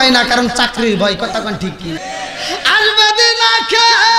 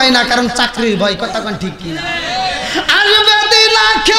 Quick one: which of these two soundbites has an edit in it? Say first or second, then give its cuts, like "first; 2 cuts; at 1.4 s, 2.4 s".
first; 1 cut; at 2.0 s